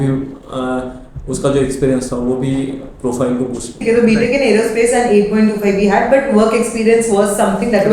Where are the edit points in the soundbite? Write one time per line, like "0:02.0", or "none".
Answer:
0:03.7